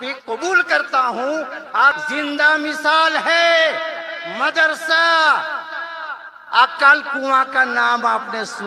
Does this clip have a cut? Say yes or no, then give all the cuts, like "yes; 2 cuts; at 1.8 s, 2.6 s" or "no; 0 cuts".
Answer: yes; 1 cut; at 2.0 s